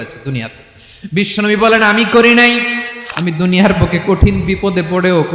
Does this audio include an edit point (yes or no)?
yes